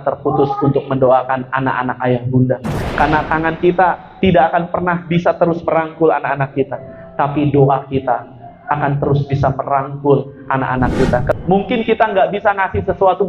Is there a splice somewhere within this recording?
yes; 1 cut; at 11.3 s

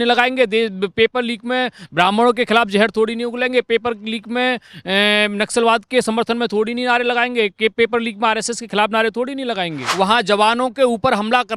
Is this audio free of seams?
no; 1 cut; at 9.8 s

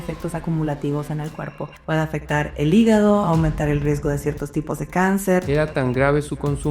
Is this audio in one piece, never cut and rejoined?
no; 2 cuts; at 1.7 s, 5.4 s

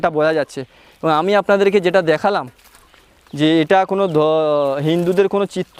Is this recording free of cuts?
yes; 0 cuts

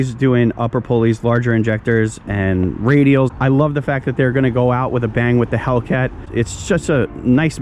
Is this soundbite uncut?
no; 2 cuts; at 3.3 s, 6.2 s

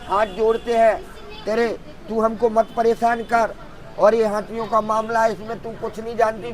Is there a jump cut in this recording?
no; 0 cuts

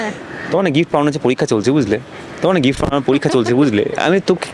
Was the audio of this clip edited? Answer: no; 0 cuts

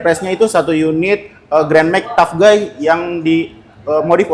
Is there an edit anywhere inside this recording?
no; 0 cuts

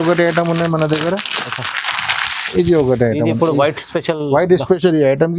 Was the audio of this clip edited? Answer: no; 0 cuts

